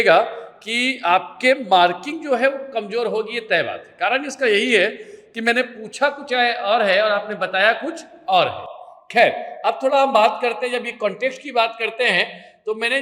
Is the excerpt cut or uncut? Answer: uncut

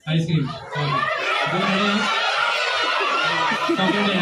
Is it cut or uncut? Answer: uncut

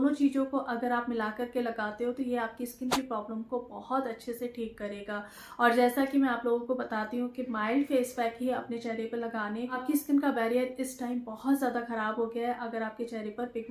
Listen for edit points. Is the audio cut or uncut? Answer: uncut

